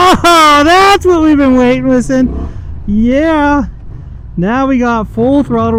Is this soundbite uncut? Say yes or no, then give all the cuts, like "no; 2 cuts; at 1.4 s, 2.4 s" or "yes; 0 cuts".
yes; 0 cuts